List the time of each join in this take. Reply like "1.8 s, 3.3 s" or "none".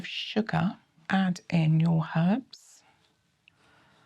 1.0 s